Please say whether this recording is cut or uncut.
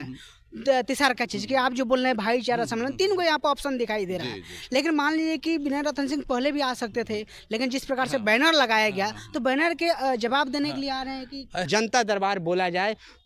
cut